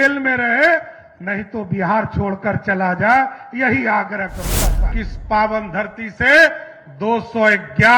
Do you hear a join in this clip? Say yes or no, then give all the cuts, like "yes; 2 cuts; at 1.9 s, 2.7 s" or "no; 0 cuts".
yes; 1 cut; at 4.8 s